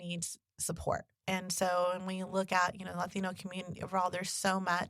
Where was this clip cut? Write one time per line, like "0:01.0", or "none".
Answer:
0:01.1